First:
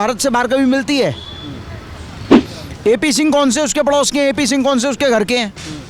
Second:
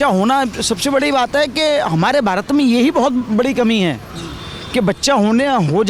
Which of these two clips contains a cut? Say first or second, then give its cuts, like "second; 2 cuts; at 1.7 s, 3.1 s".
first; 1 cut; at 2.3 s